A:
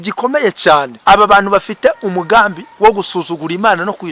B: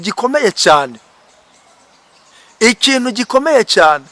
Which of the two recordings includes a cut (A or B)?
A